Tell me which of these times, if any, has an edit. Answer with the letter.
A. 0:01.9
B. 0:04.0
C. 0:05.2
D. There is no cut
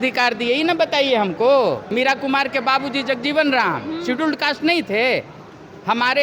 A